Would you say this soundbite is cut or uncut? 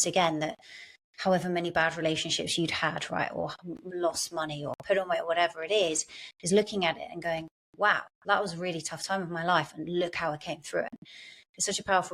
cut